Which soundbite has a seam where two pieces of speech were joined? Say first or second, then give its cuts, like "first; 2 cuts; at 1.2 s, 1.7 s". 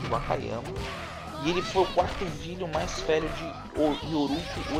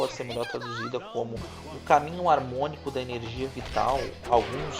second; 1 cut; at 2.8 s